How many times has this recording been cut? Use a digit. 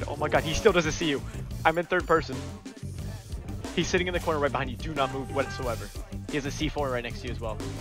0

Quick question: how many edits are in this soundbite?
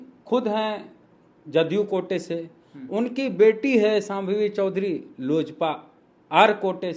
0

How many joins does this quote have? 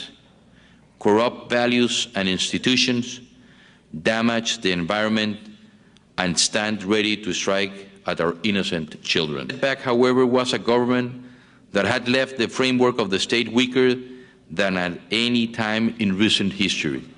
0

